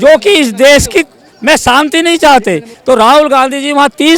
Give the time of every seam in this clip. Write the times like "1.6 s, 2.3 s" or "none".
2.7 s